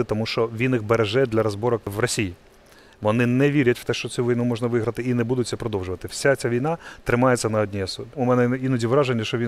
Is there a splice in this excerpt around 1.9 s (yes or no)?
yes